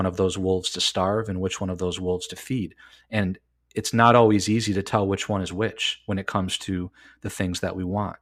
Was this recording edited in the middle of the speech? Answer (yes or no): no